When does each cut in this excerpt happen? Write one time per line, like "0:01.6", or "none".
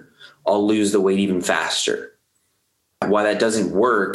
0:03.0